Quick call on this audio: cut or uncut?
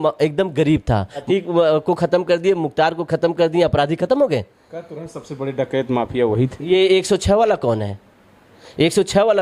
cut